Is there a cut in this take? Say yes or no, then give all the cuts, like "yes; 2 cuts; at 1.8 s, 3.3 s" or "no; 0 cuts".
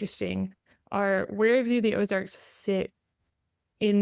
no; 0 cuts